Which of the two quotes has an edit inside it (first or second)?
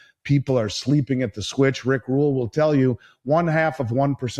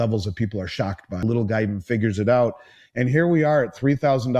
second